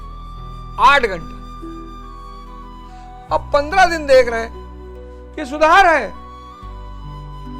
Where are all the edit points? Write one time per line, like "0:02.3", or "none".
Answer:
0:06.3